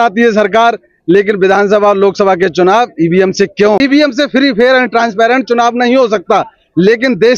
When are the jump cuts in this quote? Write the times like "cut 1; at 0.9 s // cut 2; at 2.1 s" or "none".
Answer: cut 1; at 3.8 s